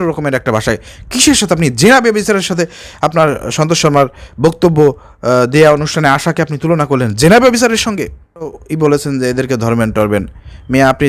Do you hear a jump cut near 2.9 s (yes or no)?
no